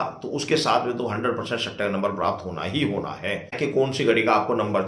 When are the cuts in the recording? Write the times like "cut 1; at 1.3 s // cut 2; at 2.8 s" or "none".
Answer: cut 1; at 3.5 s